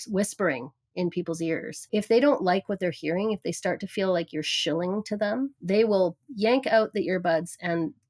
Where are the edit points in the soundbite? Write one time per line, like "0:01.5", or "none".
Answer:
0:01.7
0:05.6